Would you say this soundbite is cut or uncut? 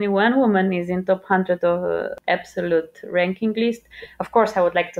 cut